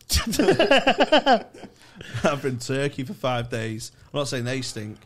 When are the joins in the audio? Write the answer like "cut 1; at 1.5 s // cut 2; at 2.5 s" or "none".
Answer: none